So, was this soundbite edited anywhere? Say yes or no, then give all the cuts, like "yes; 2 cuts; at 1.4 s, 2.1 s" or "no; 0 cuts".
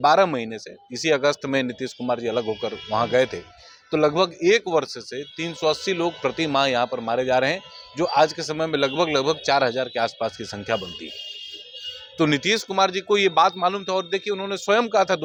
no; 0 cuts